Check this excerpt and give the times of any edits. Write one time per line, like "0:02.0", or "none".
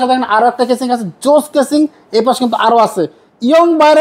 none